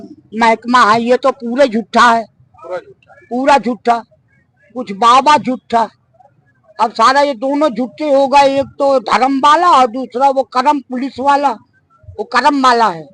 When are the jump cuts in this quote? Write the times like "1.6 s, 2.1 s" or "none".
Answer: none